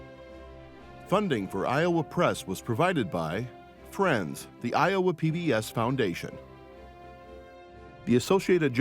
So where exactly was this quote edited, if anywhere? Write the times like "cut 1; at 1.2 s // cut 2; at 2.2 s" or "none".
cut 1; at 1.0 s